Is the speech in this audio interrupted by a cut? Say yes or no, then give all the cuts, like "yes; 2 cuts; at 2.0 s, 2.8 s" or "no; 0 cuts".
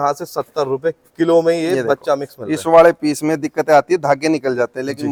no; 0 cuts